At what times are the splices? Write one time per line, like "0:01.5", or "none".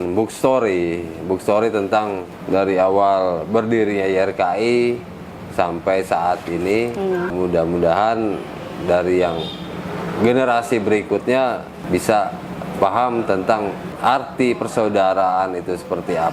0:02.3
0:07.3
0:11.8
0:13.8